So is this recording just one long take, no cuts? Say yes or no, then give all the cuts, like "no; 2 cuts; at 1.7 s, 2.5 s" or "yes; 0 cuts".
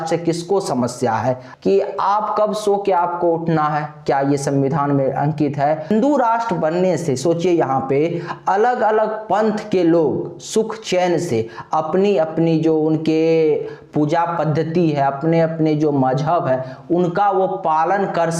no; 2 cuts; at 1.5 s, 5.9 s